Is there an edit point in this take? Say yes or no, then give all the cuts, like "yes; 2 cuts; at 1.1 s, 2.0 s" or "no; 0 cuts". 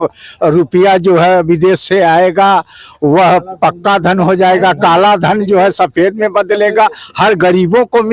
no; 0 cuts